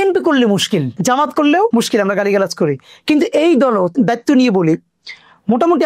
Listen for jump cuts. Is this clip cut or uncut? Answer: cut